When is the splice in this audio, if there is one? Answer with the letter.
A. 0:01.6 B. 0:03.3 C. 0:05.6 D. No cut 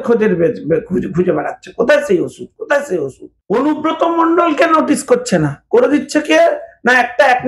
B